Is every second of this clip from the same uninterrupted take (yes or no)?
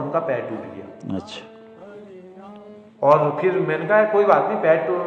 yes